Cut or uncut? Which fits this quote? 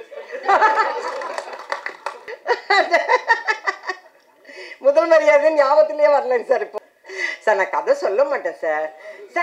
cut